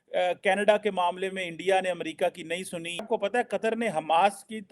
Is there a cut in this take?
yes; 1 cut; at 3.1 s

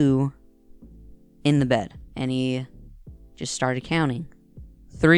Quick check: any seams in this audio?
yes; 1 cut; at 2.0 s

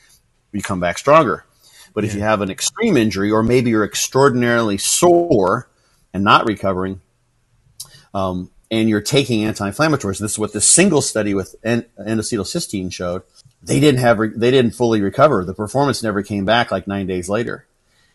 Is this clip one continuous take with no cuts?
no; 1 cut; at 13.4 s

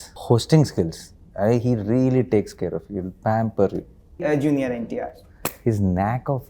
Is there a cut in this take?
yes; 1 cut; at 4.2 s

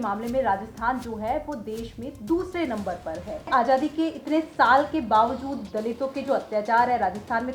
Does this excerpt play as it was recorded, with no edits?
no; 1 cut; at 3.5 s

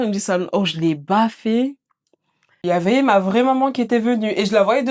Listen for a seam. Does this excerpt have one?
yes; 1 cut; at 2.6 s

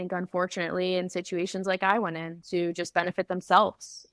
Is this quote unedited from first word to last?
yes; 0 cuts

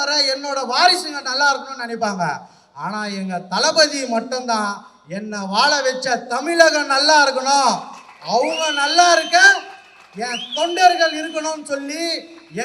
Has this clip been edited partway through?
no; 0 cuts

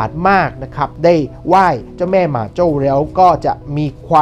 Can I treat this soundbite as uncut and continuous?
no; 1 cut; at 1.0 s

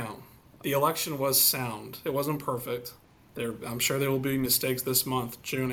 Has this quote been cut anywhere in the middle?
no; 0 cuts

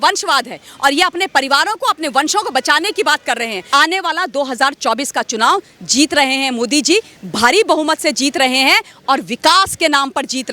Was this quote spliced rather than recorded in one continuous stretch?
yes; 1 cut; at 3.6 s

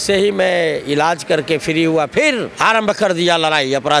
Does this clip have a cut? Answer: yes; 1 cut; at 2.5 s

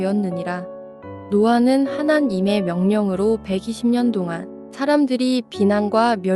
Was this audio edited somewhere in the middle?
yes; 1 cut; at 1.3 s

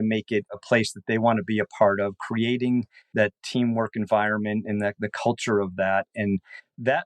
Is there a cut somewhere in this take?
yes; 1 cut; at 3.1 s

